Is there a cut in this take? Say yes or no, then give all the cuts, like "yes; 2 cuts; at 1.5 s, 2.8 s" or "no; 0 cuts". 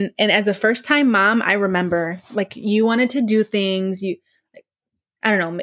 no; 0 cuts